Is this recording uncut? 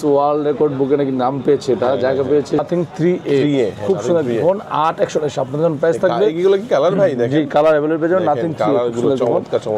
no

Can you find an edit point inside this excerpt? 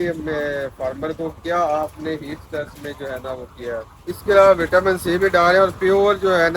yes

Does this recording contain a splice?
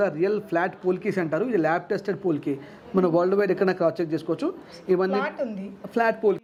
no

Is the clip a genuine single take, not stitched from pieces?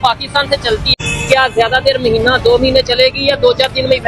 no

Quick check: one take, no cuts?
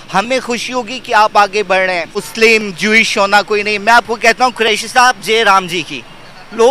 no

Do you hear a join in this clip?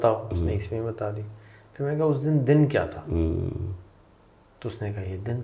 no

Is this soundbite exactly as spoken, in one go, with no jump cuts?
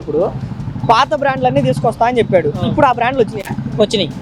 yes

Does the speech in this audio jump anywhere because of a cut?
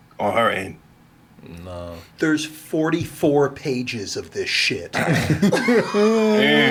no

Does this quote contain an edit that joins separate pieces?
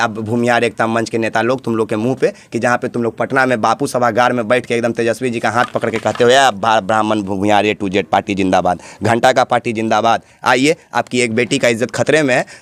no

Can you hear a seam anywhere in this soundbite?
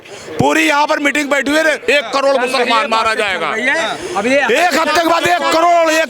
yes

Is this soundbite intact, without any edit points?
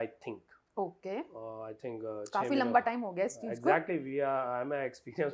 yes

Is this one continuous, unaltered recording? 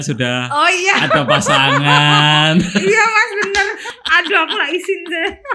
no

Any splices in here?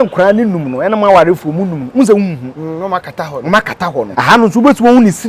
yes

